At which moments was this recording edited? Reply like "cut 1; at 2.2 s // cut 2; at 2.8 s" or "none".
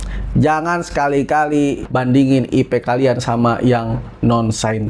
cut 1; at 1.8 s